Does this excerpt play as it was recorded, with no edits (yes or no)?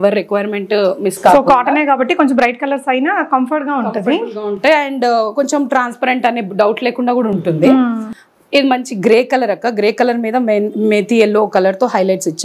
yes